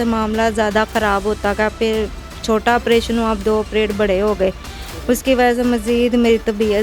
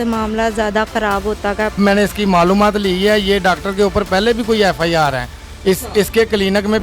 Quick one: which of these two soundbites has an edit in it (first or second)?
second